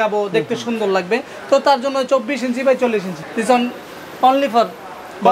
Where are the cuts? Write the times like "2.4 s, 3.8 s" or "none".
3.2 s